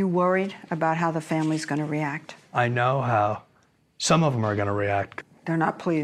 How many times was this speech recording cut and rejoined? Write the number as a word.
one